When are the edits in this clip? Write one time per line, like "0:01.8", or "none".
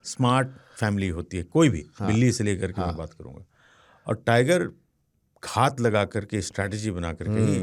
none